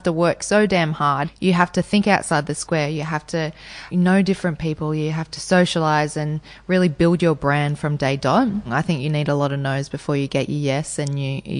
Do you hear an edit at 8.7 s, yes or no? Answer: yes